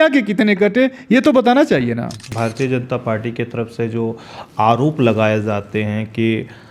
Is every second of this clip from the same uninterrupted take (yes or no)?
no